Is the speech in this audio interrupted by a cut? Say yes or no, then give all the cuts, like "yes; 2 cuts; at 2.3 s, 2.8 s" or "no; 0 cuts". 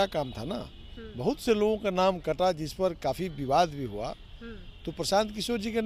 no; 0 cuts